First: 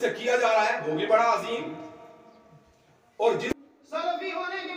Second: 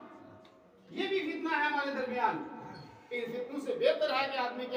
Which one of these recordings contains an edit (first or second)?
first